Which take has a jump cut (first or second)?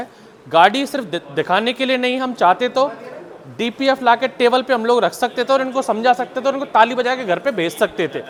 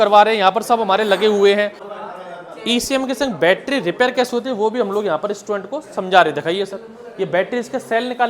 second